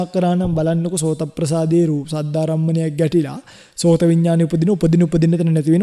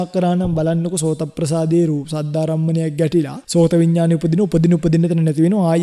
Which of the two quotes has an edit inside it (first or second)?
second